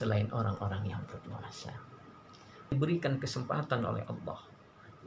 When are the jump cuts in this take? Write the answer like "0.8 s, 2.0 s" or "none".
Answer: 2.7 s